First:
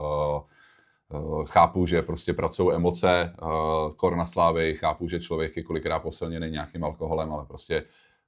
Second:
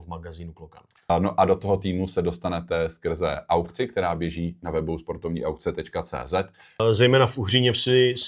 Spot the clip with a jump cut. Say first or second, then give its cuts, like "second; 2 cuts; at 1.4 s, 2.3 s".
second; 2 cuts; at 1.1 s, 6.8 s